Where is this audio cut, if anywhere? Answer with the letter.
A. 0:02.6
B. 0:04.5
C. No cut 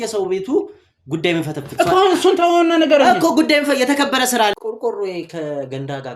B